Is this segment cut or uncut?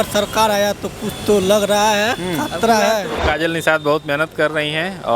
cut